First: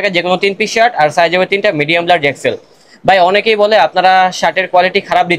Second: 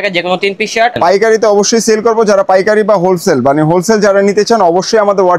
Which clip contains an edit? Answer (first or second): second